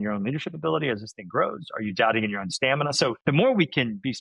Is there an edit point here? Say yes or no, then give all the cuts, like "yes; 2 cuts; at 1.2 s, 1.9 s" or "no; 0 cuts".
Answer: yes; 1 cut; at 3.2 s